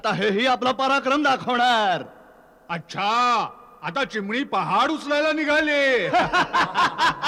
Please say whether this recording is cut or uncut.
uncut